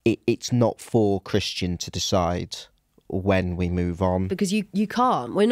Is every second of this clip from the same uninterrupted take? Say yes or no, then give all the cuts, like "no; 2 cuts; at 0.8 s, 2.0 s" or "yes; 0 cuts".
no; 1 cut; at 4.3 s